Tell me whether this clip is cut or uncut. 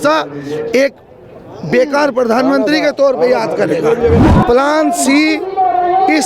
cut